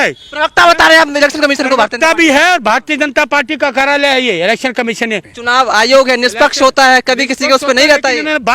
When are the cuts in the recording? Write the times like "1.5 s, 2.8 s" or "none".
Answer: 5.3 s

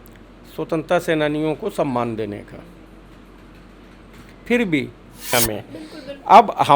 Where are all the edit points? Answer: 5.3 s

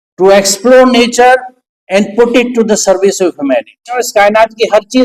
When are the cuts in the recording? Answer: 4.0 s

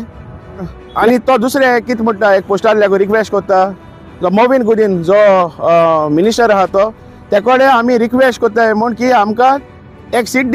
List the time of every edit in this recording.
0.9 s

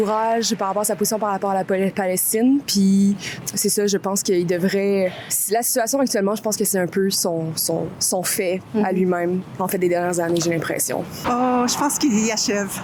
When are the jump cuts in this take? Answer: 11.1 s

